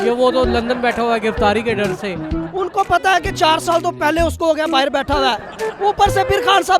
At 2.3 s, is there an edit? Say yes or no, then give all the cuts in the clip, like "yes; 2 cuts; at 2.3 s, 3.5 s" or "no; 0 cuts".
yes; 1 cut; at 2.3 s